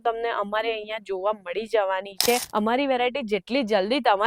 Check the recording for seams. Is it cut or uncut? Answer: cut